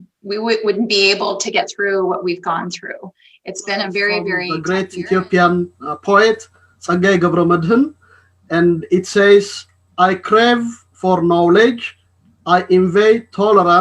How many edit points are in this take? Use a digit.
1